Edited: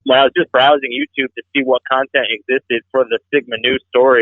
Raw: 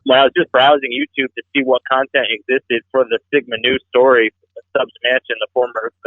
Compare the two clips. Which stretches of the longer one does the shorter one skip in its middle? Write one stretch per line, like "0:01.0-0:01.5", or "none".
none